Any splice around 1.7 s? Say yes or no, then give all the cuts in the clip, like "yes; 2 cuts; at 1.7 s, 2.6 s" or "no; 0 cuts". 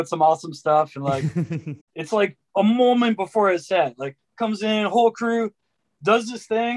yes; 1 cut; at 1.7 s